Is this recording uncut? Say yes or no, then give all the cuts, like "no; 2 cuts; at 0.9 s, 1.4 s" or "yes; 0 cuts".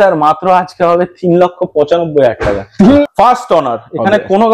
no; 1 cut; at 3.0 s